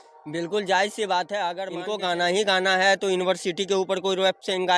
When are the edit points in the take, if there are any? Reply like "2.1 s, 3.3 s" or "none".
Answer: 1.7 s